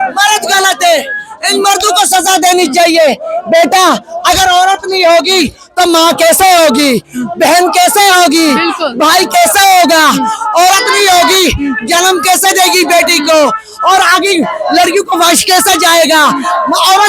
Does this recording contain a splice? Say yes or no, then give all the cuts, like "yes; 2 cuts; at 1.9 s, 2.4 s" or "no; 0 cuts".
no; 0 cuts